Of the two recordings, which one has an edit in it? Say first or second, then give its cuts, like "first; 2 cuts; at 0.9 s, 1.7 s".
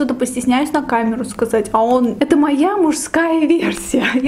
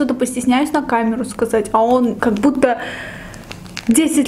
first; 1 cut; at 2.2 s